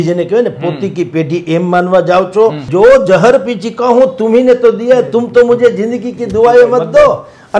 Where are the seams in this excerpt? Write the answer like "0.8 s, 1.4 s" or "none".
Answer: 2.7 s